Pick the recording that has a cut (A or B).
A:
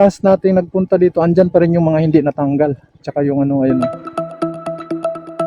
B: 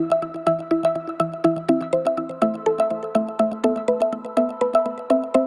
A